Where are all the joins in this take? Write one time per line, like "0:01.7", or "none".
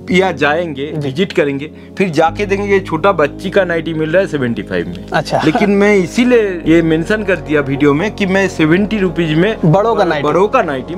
0:06.6